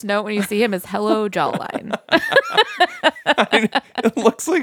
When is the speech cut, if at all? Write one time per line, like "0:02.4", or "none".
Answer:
none